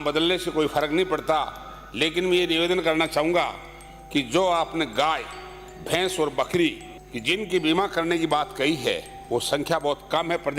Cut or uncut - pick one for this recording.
uncut